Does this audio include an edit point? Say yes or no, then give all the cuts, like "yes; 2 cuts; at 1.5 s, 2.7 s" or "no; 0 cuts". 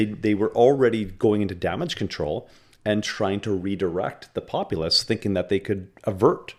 no; 0 cuts